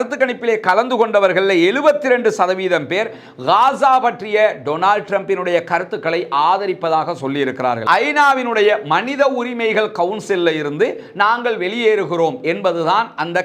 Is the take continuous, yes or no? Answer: no